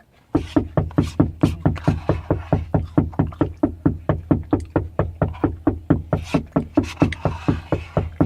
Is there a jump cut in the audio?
no; 0 cuts

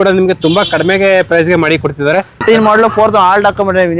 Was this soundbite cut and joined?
yes; 1 cut; at 2.4 s

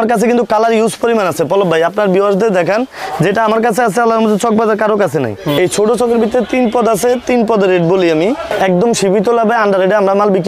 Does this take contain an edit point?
yes; 2 cuts; at 5.6 s, 8.5 s

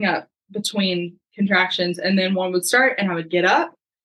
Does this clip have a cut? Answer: no; 0 cuts

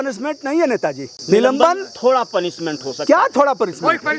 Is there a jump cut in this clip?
yes; 1 cut; at 1.1 s

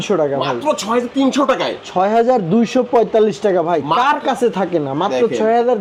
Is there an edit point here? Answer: no; 0 cuts

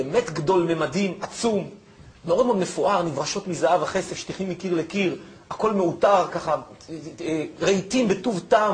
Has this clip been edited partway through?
no; 0 cuts

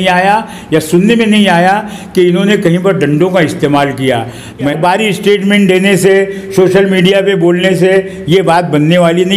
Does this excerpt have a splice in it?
yes; 1 cut; at 4.7 s

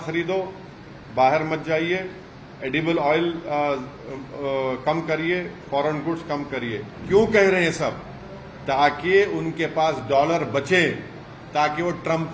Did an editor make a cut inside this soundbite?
yes; 1 cut; at 6.9 s

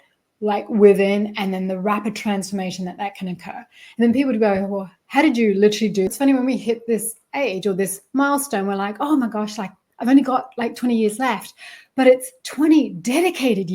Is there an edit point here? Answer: yes; 1 cut; at 6.1 s

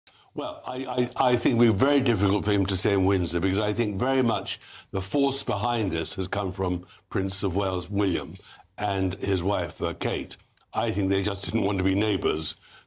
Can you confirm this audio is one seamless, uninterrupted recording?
yes; 0 cuts

